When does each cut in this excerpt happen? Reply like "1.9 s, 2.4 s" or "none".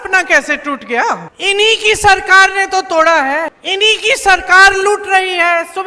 1.3 s, 3.6 s